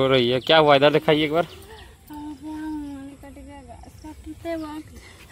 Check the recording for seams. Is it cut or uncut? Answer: uncut